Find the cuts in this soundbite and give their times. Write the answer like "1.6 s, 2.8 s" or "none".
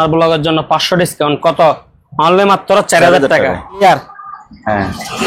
3.8 s